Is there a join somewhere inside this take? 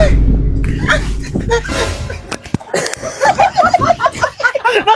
no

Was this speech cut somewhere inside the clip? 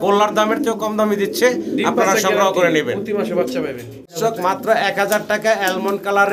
yes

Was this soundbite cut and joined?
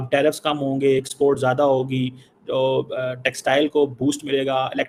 no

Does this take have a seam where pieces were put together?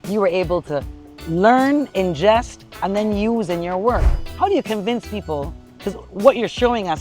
yes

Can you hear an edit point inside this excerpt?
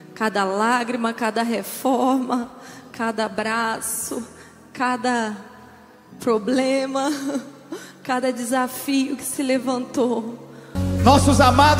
yes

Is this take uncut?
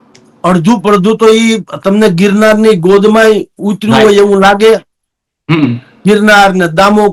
yes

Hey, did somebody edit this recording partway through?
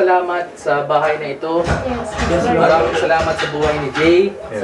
no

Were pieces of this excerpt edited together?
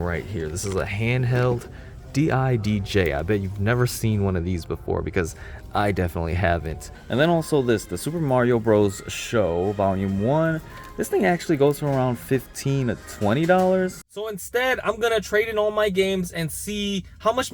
yes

